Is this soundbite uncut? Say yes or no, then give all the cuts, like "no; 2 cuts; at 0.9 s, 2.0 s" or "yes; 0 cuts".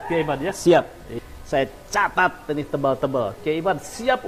no; 1 cut; at 1.1 s